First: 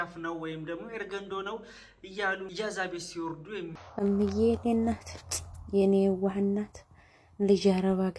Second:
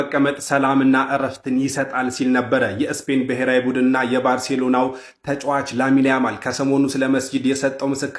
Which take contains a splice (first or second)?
first